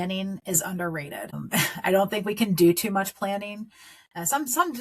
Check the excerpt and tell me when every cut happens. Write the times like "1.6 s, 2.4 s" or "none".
1.5 s